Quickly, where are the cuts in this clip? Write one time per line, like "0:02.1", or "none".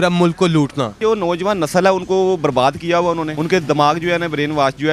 0:00.9
0:03.3